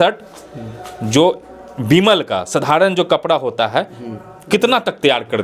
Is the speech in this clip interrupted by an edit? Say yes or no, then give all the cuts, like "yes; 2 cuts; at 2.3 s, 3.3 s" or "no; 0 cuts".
no; 0 cuts